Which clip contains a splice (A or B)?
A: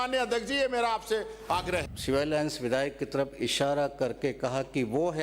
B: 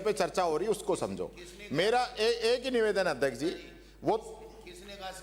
A